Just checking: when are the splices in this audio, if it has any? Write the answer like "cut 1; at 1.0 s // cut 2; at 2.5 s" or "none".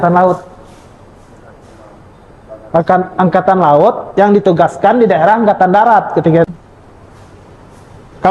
cut 1; at 6.5 s